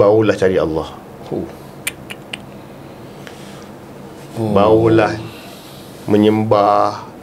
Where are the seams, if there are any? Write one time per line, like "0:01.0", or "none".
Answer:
none